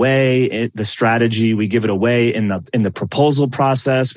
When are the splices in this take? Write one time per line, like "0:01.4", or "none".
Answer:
none

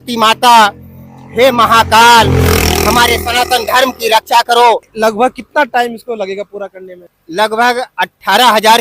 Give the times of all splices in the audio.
0:04.9
0:07.2

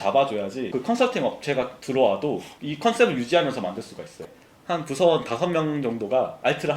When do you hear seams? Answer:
0:04.3

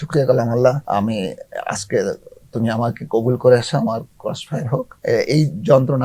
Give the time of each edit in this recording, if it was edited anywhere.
0:00.8
0:04.9

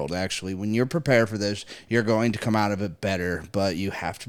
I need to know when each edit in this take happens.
none

